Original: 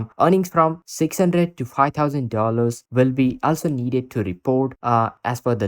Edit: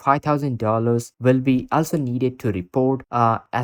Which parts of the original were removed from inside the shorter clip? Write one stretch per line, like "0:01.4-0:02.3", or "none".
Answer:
none